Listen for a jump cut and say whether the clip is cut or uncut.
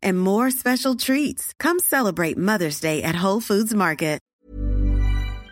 cut